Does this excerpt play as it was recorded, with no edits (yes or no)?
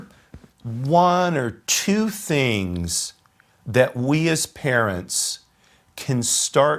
yes